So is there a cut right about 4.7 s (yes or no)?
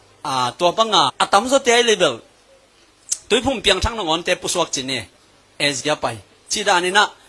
no